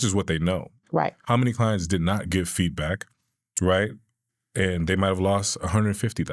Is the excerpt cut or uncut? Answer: uncut